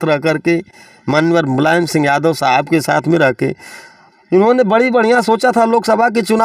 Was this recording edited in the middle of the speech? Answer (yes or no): no